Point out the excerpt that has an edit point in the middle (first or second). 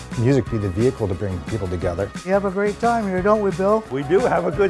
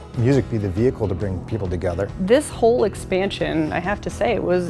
first